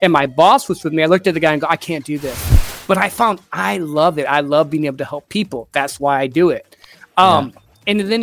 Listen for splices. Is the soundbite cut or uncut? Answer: cut